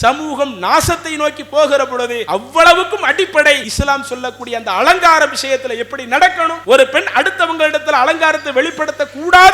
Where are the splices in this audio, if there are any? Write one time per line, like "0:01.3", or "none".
0:02.2
0:03.7
0:06.5